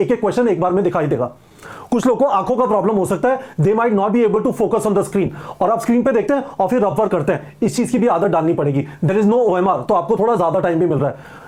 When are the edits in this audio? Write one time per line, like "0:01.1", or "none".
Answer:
none